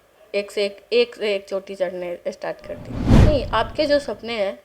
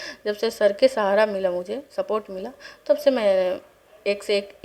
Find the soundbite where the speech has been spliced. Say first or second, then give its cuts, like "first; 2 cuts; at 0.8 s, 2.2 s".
first; 1 cut; at 3.0 s